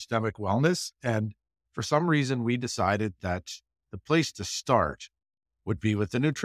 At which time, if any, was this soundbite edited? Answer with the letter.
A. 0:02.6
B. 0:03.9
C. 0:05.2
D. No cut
D